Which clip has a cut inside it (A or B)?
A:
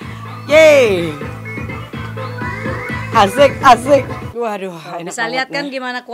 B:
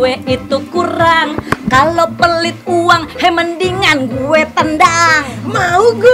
A